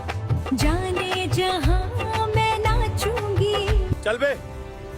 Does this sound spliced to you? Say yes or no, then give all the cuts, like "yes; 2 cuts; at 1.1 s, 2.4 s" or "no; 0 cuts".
yes; 1 cut; at 3.9 s